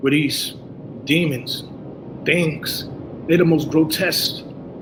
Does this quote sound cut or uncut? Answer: uncut